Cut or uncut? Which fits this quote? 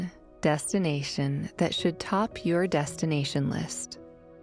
uncut